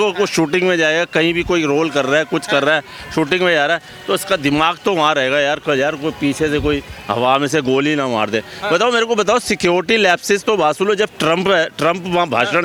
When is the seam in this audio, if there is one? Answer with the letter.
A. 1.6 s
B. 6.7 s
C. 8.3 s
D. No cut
D